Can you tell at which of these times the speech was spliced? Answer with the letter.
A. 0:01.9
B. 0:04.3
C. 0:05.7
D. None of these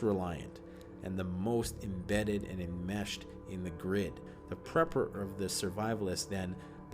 B